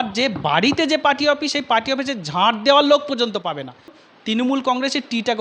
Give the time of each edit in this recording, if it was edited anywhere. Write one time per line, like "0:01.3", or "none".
0:04.0